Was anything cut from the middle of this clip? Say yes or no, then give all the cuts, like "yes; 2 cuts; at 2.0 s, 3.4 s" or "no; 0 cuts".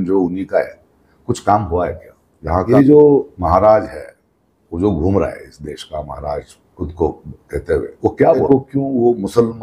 yes; 2 cuts; at 2.6 s, 8.5 s